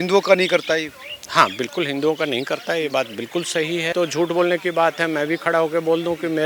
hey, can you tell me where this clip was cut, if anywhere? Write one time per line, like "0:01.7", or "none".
0:03.9